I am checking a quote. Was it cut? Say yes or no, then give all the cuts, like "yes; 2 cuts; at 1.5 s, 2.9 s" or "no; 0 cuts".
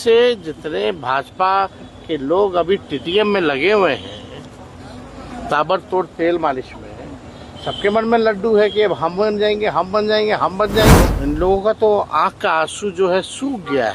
yes; 1 cut; at 11.1 s